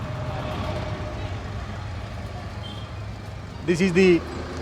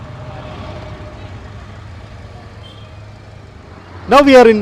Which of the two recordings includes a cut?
first; 1 cut; at 3.4 s

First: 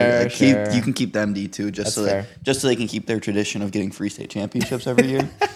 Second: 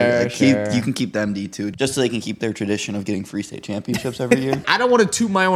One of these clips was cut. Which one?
second; 2 cuts; at 1.7 s, 4.6 s

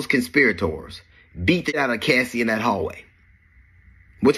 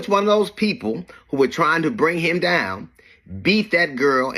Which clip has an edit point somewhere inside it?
first; 1 cut; at 1.7 s

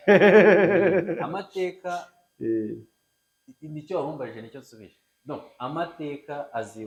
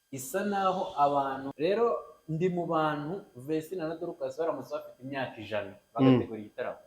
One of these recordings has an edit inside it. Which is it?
second; 1 cut; at 1.5 s

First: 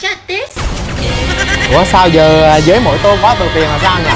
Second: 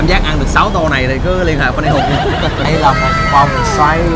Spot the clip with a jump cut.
second; 1 cut; at 2.7 s

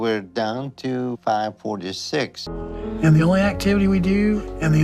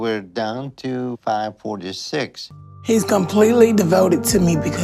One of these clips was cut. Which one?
second; 1 cut; at 2.6 s

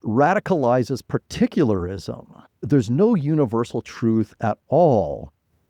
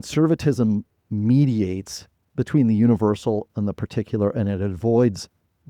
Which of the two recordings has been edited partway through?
first; 1 cut; at 2.6 s

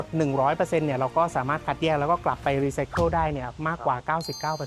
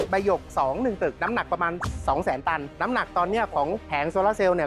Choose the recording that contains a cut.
second; 3 cuts; at 1.2 s, 2.7 s, 3.8 s

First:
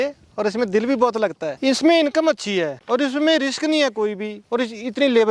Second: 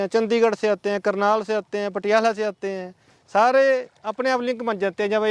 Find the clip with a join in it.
first; 3 cuts; at 1.5 s, 2.8 s, 4.3 s

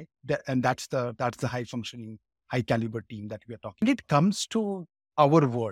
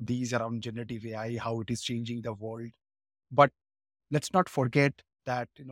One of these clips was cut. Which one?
first; 1 cut; at 3.8 s

